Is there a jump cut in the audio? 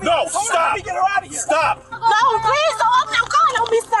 yes; 1 cut; at 2.0 s

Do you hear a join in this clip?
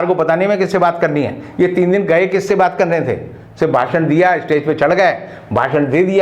no; 0 cuts

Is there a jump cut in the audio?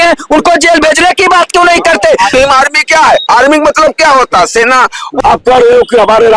yes; 2 cuts; at 2.3 s, 5.0 s

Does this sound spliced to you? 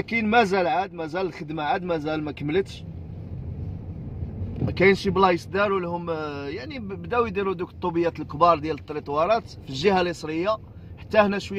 no; 0 cuts

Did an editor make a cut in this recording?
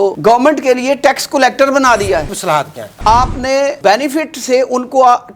yes; 1 cut; at 2.8 s

